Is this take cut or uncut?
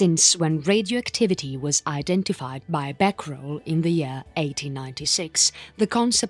cut